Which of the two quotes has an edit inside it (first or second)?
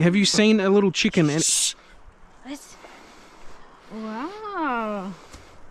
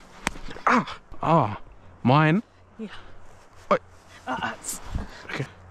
second